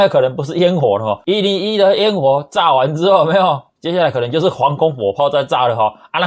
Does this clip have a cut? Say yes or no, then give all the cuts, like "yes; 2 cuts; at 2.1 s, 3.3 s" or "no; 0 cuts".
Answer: yes; 1 cut; at 1.2 s